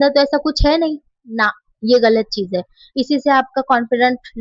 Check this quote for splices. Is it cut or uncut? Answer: uncut